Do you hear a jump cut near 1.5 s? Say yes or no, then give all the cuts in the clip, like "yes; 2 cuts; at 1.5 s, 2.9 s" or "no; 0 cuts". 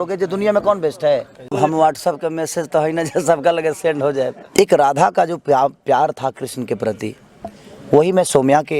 yes; 2 cuts; at 1.5 s, 4.4 s